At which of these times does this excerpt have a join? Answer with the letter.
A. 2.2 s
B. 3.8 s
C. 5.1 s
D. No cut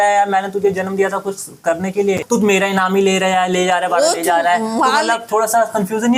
A